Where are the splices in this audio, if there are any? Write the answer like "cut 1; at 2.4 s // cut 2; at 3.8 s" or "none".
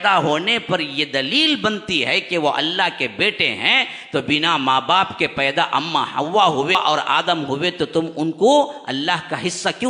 cut 1; at 6.7 s